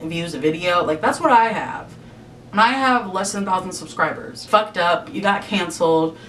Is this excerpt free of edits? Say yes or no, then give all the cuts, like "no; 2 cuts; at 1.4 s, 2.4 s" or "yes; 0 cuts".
no; 1 cut; at 4.3 s